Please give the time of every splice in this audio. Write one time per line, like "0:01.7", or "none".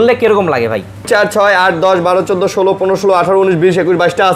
0:01.1